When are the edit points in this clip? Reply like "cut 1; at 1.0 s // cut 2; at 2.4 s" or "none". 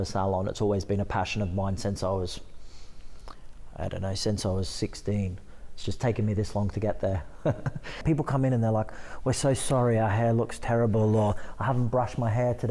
cut 1; at 8.0 s